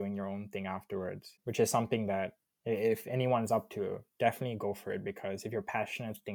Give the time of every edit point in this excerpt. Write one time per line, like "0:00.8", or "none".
0:01.3